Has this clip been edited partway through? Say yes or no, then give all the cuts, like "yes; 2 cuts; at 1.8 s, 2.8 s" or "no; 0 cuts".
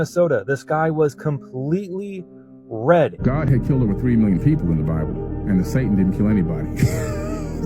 yes; 1 cut; at 3.2 s